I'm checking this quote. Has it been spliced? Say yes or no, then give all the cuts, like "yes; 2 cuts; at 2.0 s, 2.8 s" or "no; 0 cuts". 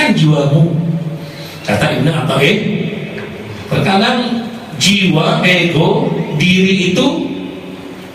no; 0 cuts